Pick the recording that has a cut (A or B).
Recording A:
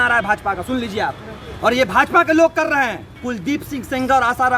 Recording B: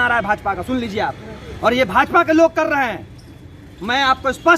A